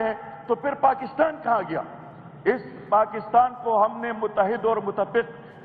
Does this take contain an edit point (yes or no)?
no